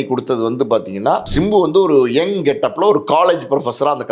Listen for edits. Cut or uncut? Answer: cut